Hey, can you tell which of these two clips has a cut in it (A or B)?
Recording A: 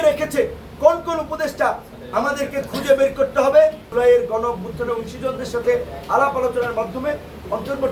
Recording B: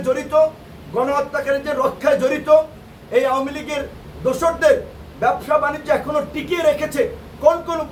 A